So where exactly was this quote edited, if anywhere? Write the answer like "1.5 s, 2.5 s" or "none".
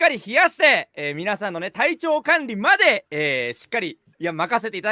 none